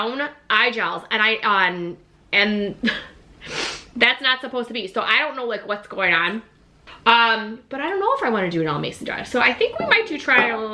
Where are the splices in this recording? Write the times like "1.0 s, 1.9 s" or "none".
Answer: 6.9 s